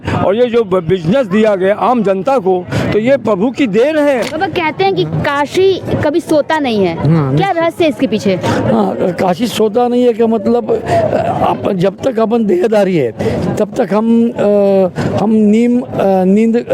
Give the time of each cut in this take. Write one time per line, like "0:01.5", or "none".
0:04.3

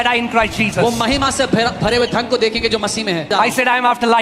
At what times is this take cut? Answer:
0:03.3

